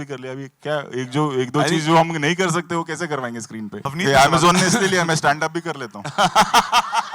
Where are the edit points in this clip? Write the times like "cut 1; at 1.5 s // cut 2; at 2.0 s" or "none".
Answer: cut 1; at 3.8 s